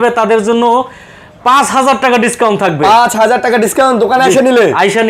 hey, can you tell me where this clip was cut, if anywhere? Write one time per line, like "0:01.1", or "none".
none